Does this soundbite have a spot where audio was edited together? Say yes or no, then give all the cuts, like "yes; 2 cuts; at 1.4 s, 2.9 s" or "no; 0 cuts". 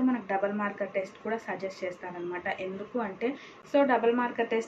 no; 0 cuts